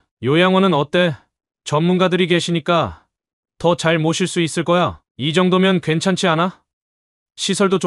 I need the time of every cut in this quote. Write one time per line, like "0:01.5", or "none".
0:05.0